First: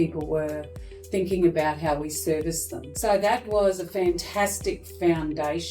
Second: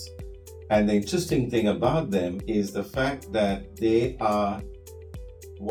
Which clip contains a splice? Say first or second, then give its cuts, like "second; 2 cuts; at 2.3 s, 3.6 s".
first; 1 cut; at 2.9 s